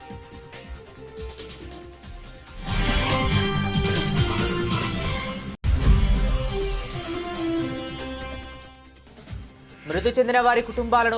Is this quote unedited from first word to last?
no; 1 cut; at 9.5 s

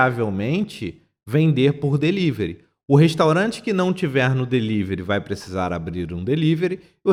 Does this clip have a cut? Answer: no; 0 cuts

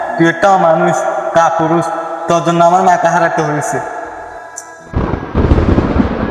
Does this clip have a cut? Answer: no; 0 cuts

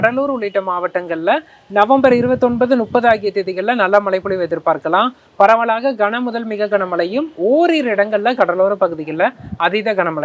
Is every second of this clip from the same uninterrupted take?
yes; 0 cuts

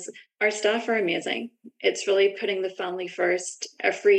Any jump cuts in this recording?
no; 0 cuts

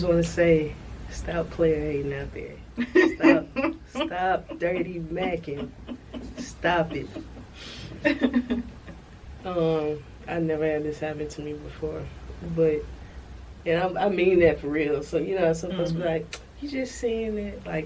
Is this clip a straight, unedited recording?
yes; 0 cuts

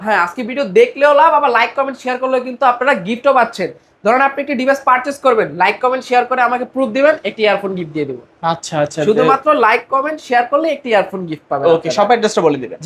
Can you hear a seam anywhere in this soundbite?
no; 0 cuts

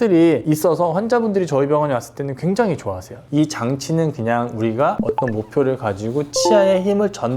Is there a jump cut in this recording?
yes; 1 cut; at 3.3 s

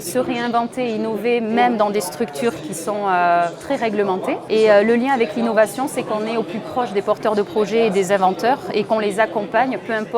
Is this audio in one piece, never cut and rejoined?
no; 2 cuts; at 2.6 s, 4.4 s

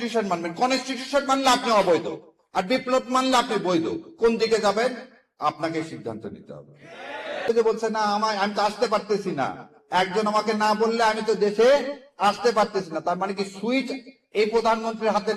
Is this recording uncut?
no; 1 cut; at 7.5 s

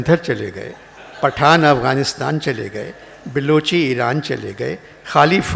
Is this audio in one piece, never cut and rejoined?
yes; 0 cuts

